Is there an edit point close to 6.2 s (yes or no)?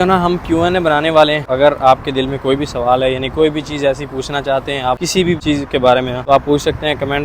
yes